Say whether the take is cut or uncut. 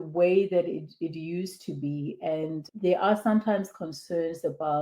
uncut